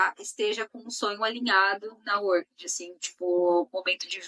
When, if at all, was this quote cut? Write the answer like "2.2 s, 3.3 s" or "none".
none